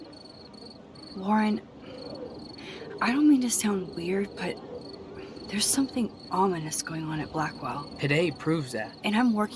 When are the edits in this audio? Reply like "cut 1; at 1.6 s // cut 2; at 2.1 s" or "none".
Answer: cut 1; at 1.1 s